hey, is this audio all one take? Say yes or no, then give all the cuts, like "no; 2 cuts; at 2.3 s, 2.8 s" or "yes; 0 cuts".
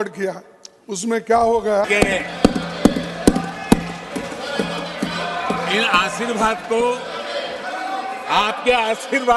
no; 1 cut; at 1.9 s